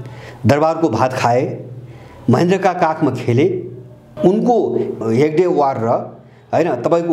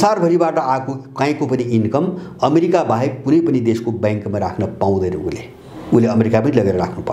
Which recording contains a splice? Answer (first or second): first